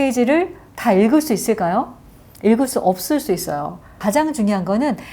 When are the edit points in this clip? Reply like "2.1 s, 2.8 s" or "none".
4.0 s